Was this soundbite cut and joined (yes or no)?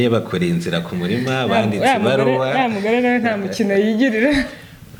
no